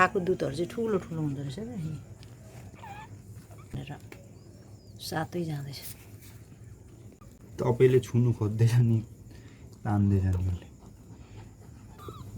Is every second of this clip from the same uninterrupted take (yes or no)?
no